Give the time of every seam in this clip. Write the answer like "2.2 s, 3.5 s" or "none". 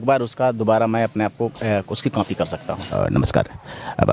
2.8 s